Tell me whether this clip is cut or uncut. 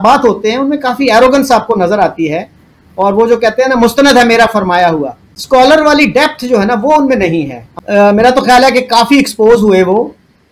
uncut